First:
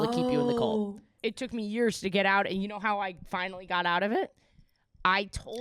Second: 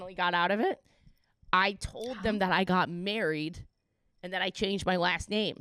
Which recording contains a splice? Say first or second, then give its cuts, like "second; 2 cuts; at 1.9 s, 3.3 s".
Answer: first; 1 cut; at 1.1 s